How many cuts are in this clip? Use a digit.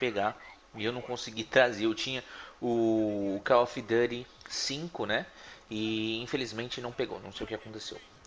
1